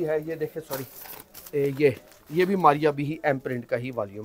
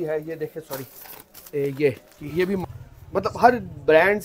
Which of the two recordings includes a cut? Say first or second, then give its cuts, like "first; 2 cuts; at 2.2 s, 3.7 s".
second; 1 cut; at 2.6 s